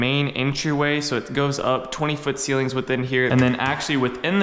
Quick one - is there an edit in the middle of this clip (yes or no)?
yes